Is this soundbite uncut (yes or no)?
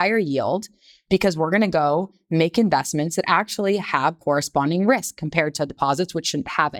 yes